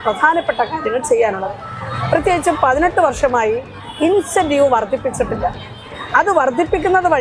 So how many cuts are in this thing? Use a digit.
1